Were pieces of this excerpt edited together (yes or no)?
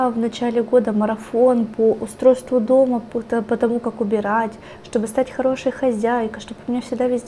no